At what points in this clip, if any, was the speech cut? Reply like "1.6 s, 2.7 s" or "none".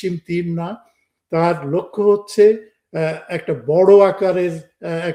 none